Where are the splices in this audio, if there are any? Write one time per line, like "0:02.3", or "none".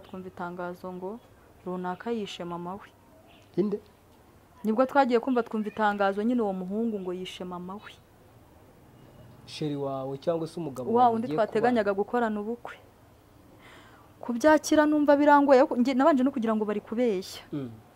none